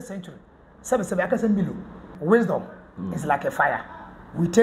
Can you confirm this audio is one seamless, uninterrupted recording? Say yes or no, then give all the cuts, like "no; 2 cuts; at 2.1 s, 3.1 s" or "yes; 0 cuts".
no; 1 cut; at 2.1 s